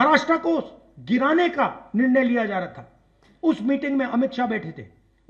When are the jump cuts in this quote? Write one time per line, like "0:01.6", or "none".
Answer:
none

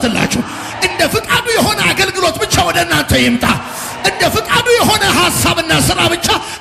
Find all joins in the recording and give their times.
none

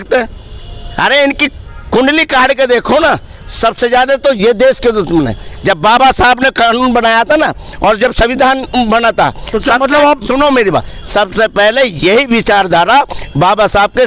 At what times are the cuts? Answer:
none

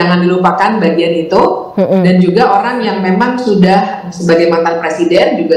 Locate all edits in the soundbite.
none

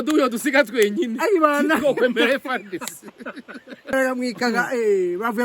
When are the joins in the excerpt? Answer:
0:03.9

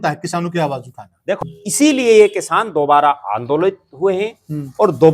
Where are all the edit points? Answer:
0:01.4

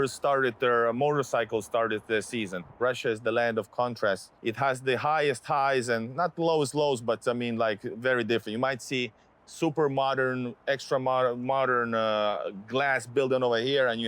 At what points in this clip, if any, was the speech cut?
0:02.8
0:04.3

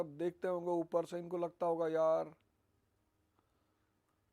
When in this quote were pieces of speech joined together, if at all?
none

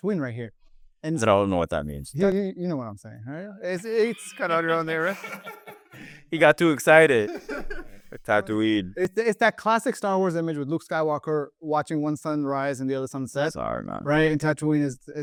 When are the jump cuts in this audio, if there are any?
none

